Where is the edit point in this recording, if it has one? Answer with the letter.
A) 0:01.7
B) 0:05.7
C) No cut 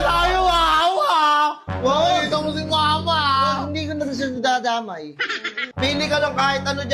B